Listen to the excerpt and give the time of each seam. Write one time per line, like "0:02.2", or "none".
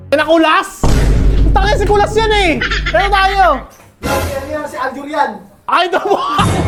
none